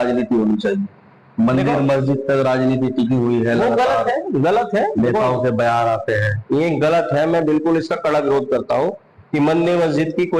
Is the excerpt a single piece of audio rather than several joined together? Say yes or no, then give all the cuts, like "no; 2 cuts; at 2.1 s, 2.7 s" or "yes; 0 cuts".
yes; 0 cuts